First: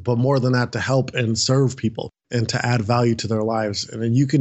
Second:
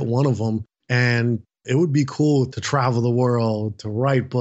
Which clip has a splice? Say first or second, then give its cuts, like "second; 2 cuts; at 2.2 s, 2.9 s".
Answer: second; 1 cut; at 1.5 s